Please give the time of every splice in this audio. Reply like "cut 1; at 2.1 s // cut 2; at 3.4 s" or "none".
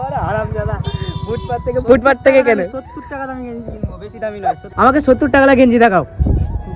cut 1; at 4.7 s